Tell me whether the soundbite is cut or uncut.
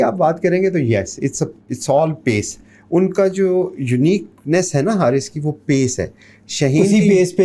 uncut